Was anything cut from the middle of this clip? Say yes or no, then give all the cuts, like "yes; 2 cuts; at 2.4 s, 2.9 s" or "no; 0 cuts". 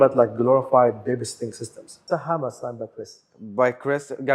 yes; 1 cut; at 2.0 s